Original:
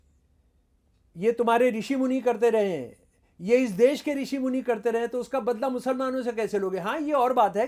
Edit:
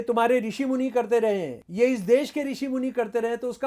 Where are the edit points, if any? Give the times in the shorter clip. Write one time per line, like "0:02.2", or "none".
0:01.6